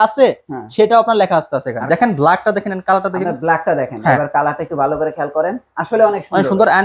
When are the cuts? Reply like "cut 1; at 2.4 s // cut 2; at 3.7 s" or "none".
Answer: cut 1; at 1.8 s